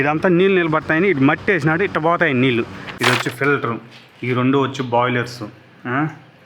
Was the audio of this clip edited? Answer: yes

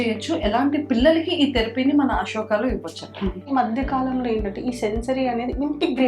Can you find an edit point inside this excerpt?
yes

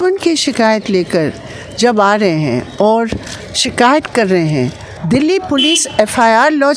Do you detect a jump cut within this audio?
yes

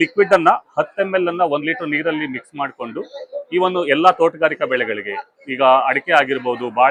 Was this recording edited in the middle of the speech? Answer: no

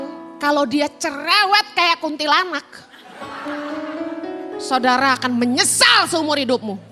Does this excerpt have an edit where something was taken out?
no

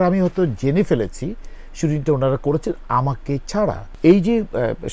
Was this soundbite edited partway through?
yes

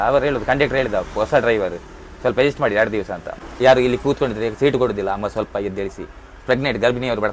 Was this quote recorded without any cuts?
no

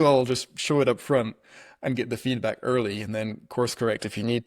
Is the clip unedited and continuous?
yes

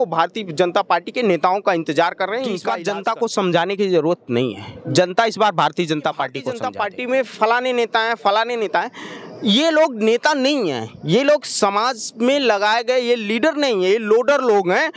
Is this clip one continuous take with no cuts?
no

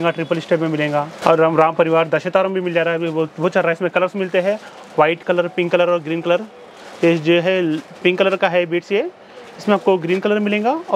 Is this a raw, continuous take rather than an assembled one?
yes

